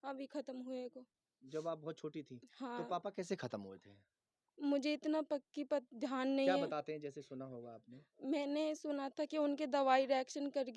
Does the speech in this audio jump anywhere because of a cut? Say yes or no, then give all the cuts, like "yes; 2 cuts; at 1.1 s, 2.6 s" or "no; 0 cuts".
no; 0 cuts